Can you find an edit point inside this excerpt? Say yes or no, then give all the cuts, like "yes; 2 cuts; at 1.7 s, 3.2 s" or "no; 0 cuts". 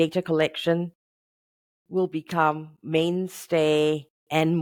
no; 0 cuts